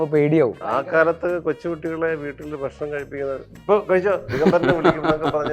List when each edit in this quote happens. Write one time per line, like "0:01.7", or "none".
0:00.9

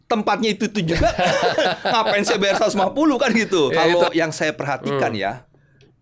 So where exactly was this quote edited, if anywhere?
0:03.8

